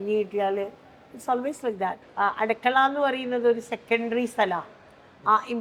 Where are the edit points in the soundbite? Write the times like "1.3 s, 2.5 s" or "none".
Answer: 2.0 s